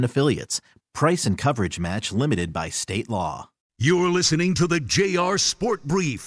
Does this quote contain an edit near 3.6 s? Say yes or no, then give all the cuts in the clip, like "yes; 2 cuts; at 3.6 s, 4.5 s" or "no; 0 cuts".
yes; 1 cut; at 3.6 s